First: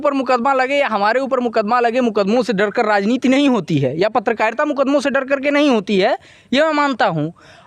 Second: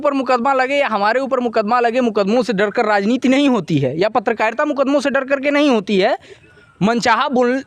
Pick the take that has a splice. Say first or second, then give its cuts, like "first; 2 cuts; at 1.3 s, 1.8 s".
second; 1 cut; at 6.4 s